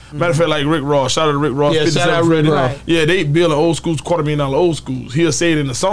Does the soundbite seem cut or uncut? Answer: uncut